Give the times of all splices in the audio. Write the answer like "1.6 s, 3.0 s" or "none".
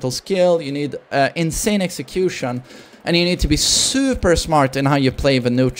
none